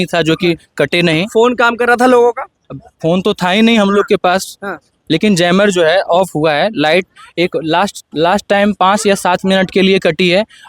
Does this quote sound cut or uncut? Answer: uncut